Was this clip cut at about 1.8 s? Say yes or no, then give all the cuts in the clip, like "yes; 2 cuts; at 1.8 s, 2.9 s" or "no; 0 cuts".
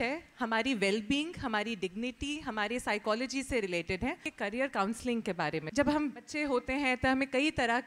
no; 3 cuts; at 4.3 s, 5.7 s, 6.3 s